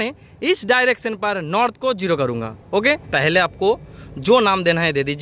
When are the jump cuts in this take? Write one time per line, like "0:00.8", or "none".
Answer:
0:03.1